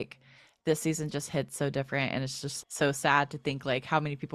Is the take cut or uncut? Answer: uncut